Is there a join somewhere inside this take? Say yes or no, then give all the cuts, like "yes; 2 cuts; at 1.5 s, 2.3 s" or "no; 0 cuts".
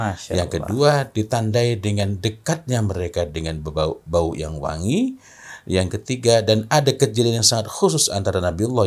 no; 0 cuts